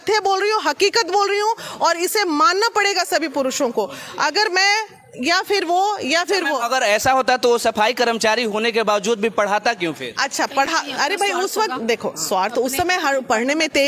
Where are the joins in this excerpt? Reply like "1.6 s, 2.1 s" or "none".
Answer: none